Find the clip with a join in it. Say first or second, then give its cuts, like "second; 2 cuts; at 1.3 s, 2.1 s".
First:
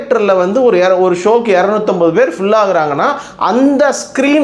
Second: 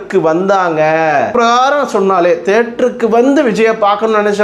second; 1 cut; at 1.3 s